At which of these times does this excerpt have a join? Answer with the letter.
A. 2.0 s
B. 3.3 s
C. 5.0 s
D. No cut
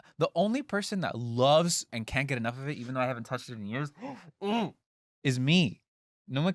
A